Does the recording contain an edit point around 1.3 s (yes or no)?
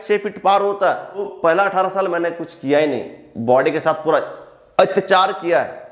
yes